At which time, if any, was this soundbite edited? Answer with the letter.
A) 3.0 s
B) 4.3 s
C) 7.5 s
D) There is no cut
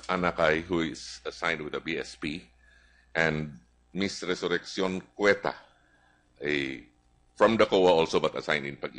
C